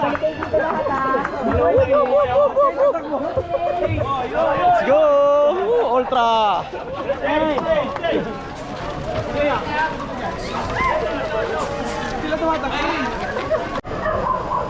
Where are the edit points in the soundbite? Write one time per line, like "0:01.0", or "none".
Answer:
none